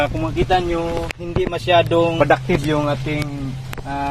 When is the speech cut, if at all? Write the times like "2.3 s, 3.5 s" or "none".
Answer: 2.1 s